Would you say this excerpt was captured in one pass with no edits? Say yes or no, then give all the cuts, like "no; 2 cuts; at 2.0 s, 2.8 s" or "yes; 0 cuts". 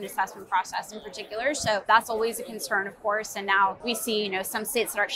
no; 2 cuts; at 1.8 s, 3.8 s